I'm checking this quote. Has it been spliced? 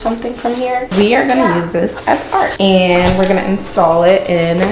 yes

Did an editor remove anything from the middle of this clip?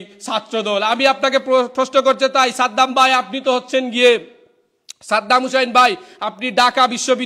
no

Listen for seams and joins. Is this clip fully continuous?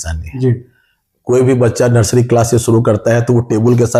yes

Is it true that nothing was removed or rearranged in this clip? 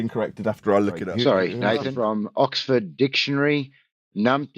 no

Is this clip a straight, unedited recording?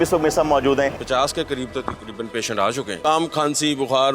no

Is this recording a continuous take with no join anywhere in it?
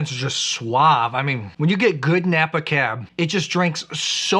no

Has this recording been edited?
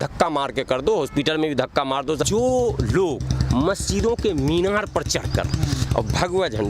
yes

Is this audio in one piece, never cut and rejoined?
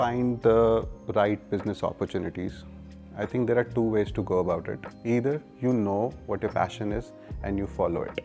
yes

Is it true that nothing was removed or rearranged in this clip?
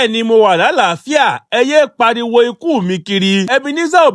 yes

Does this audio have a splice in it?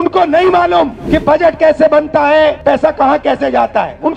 yes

